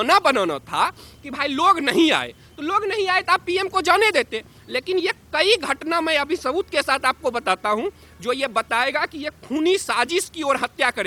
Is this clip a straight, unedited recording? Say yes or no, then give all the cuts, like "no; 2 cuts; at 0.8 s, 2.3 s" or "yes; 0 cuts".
yes; 0 cuts